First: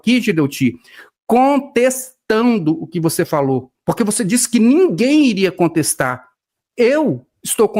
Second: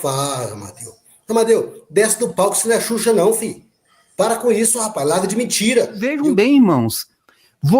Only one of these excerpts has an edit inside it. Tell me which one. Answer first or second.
second